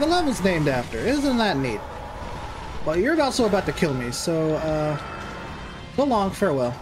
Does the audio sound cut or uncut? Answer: uncut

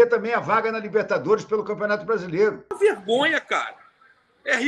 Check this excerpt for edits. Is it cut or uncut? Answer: cut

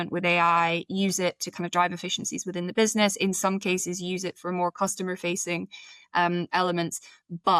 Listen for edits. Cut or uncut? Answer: uncut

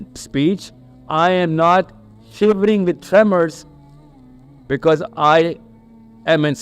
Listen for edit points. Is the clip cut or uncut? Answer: uncut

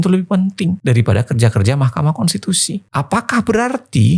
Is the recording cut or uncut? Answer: uncut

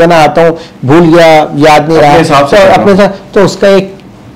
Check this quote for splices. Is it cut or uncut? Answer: uncut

